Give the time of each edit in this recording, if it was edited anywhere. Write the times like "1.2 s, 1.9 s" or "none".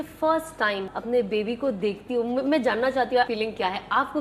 0.9 s, 3.3 s